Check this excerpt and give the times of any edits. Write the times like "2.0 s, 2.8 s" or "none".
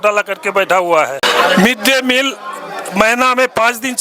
1.2 s